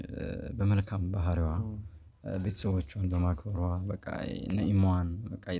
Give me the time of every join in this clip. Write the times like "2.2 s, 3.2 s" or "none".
none